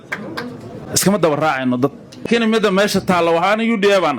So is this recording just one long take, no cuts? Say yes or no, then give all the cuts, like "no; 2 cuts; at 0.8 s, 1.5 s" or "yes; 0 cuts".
no; 1 cut; at 2.2 s